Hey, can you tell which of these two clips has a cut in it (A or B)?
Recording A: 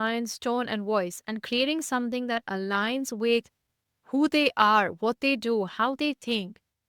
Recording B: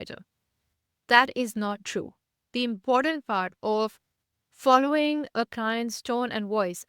B